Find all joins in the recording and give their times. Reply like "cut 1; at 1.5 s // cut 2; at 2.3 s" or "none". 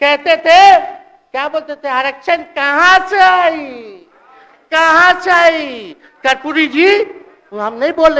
none